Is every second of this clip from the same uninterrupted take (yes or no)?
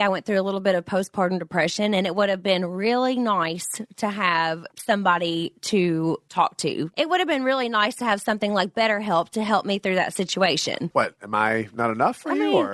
yes